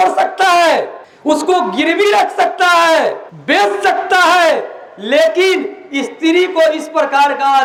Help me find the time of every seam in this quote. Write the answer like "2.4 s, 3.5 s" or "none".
none